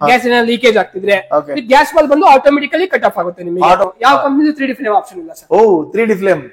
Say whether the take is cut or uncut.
cut